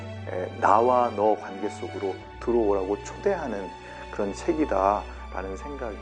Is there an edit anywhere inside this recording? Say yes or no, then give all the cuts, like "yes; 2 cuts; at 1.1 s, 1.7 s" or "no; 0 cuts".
no; 0 cuts